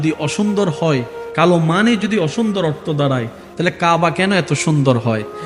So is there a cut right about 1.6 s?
no; 0 cuts

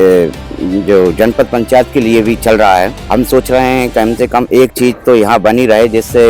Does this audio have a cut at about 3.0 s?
yes; 1 cut; at 3.0 s

